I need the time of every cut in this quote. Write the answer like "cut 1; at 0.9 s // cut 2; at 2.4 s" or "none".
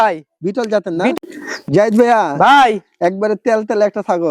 cut 1; at 1.1 s